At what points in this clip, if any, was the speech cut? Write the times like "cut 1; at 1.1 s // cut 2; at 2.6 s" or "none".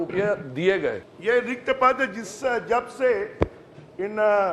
cut 1; at 1.1 s